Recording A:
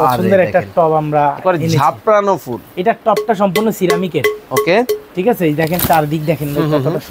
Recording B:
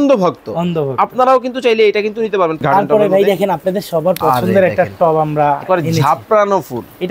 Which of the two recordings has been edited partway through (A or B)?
B